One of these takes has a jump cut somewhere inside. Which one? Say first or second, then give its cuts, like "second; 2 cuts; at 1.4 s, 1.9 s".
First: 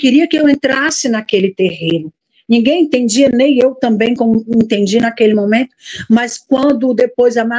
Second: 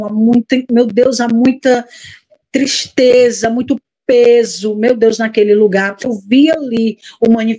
second; 1 cut; at 6.2 s